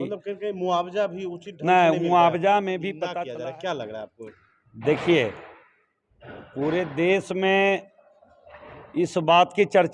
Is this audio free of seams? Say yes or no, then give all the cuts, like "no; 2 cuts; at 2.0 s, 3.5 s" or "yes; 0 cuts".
no; 1 cut; at 3.0 s